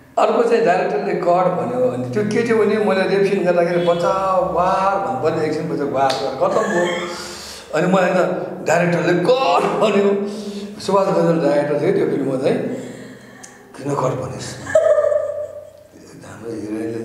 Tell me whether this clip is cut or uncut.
uncut